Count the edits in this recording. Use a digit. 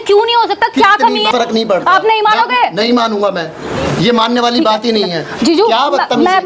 1